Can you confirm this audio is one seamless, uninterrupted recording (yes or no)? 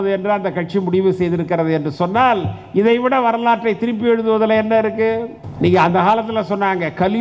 no